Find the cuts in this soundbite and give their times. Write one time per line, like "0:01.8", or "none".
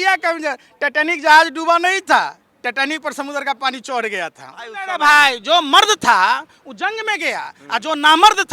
0:04.9